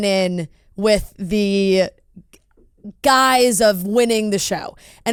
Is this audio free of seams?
yes; 0 cuts

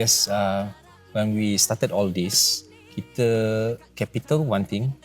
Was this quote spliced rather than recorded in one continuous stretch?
yes; 1 cut; at 3.9 s

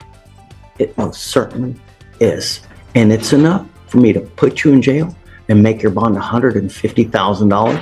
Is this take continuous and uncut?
yes; 0 cuts

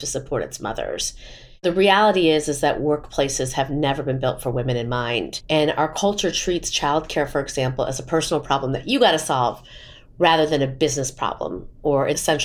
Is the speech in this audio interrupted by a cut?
yes; 1 cut; at 5.4 s

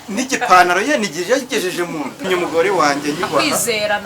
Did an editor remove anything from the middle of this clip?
yes; 1 cut; at 2.2 s

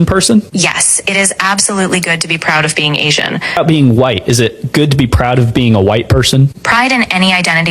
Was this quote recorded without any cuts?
no; 1 cut; at 3.6 s

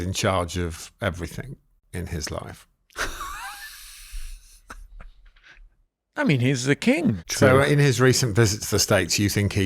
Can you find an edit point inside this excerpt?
yes; 1 cut; at 7.2 s

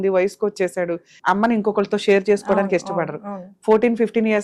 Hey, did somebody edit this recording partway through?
yes; 1 cut; at 1.1 s

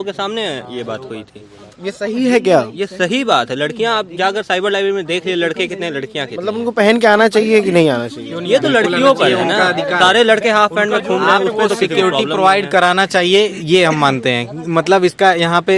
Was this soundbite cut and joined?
no; 0 cuts

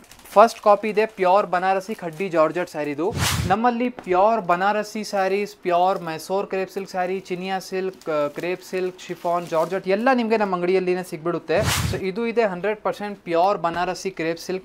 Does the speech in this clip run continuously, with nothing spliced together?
no; 2 cuts; at 3.2 s, 11.8 s

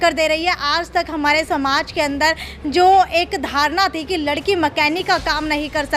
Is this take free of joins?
yes; 0 cuts

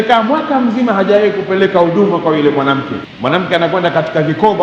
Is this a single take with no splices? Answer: no; 1 cut; at 3.0 s

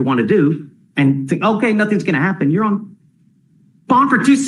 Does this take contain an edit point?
no; 0 cuts

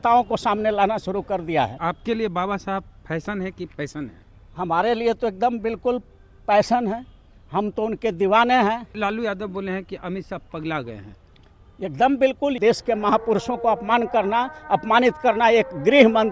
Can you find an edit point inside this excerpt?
yes; 3 cuts; at 1.8 s, 9.0 s, 12.6 s

